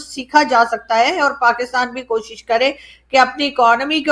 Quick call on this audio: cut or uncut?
uncut